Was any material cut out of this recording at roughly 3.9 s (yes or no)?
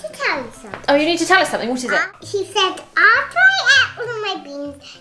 no